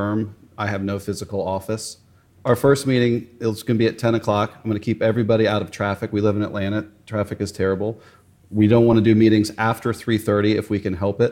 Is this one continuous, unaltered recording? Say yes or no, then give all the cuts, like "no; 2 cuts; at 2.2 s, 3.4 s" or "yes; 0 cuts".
no; 1 cut; at 2.4 s